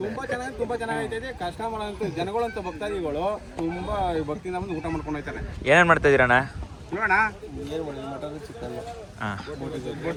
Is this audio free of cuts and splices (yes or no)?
yes